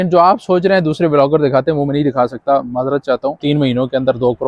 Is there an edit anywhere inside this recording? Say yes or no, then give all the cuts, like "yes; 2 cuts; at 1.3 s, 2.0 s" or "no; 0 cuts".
yes; 1 cut; at 3.4 s